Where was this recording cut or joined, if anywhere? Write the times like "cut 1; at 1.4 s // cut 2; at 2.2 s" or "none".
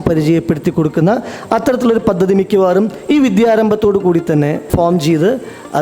cut 1; at 4.7 s